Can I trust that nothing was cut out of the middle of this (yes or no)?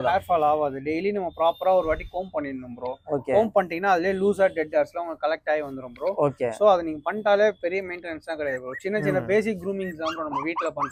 yes